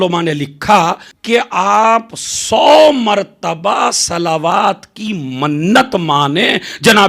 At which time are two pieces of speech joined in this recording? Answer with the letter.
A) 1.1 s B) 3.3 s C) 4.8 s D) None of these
A